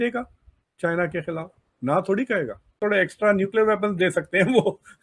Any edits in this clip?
yes; 1 cut; at 2.7 s

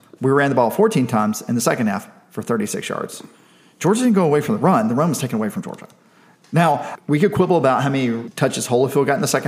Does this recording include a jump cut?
yes; 2 cuts; at 6.9 s, 8.3 s

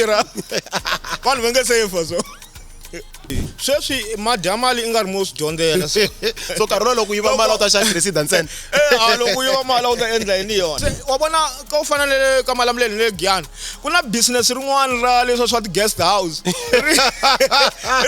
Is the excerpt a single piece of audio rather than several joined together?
no; 2 cuts; at 3.3 s, 10.8 s

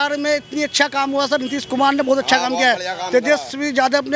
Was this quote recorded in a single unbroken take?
yes; 0 cuts

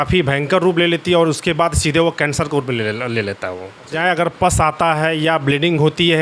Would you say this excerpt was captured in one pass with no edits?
no; 1 cut; at 4.0 s

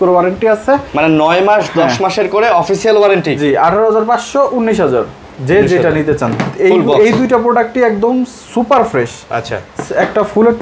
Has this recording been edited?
no; 0 cuts

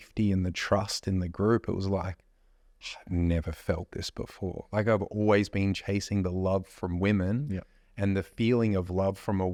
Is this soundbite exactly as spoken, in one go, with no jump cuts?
yes; 0 cuts

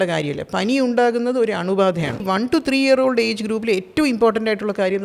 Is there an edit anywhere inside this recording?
yes; 1 cut; at 2.2 s

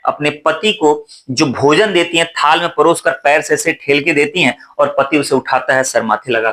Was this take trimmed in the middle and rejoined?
no; 0 cuts

